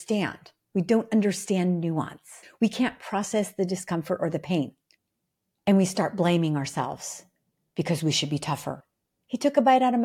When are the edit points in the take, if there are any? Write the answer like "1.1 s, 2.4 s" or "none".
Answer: 2.4 s, 8.9 s